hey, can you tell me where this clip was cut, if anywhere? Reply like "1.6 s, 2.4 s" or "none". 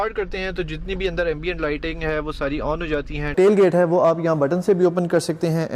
3.3 s